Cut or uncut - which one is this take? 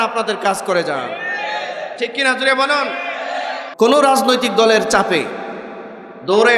cut